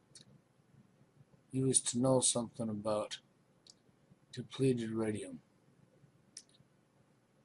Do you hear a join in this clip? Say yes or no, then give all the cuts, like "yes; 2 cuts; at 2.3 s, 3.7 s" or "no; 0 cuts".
no; 0 cuts